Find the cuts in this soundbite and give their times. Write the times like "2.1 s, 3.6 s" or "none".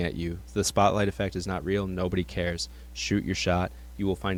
none